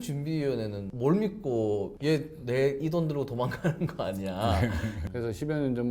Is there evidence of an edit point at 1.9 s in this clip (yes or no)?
yes